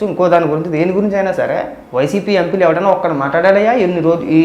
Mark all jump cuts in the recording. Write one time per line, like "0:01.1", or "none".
0:01.8